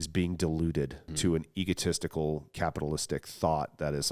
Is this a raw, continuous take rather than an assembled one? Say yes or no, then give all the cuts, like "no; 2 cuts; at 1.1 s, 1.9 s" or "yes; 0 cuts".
no; 2 cuts; at 1.0 s, 2.5 s